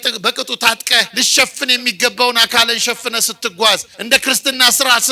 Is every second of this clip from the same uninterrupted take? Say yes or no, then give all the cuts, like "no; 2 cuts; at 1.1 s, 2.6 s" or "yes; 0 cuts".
no; 2 cuts; at 1.1 s, 3.9 s